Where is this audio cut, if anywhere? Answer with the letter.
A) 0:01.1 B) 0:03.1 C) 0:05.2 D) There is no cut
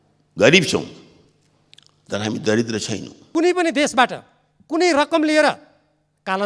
B